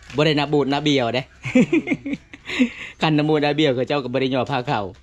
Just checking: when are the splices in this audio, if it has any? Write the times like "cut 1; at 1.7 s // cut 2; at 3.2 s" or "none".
none